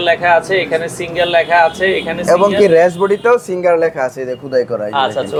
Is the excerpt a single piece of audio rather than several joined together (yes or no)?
yes